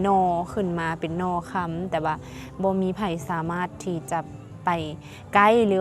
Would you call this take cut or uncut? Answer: uncut